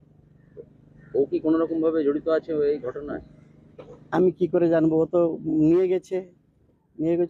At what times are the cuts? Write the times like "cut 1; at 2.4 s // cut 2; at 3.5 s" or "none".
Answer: none